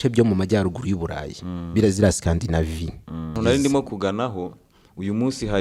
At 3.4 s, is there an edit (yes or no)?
yes